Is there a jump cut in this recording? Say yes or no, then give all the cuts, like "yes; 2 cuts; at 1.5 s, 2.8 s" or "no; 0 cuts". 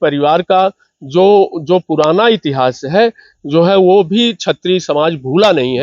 no; 0 cuts